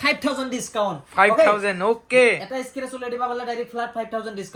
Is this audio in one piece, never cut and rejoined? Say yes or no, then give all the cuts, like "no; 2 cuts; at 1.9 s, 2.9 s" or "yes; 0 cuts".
yes; 0 cuts